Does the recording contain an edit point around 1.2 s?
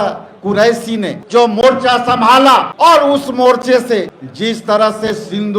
yes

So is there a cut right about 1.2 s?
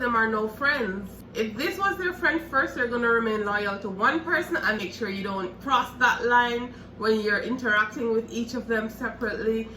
yes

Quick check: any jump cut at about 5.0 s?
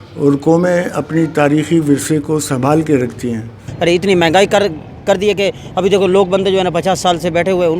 no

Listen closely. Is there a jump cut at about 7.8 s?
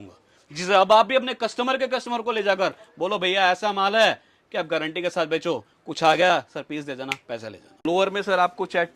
yes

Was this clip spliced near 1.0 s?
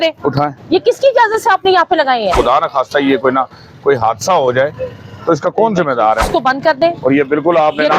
no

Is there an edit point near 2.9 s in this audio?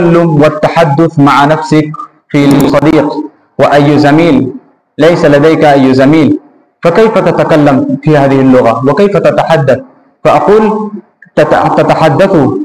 yes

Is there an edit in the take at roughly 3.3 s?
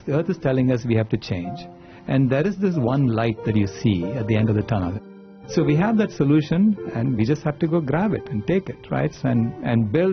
no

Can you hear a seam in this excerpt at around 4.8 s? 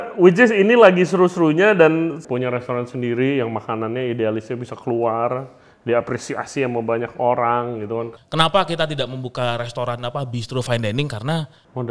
no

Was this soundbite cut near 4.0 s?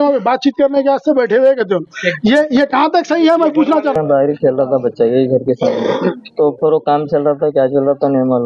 yes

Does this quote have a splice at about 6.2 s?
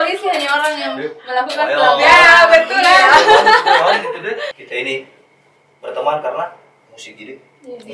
no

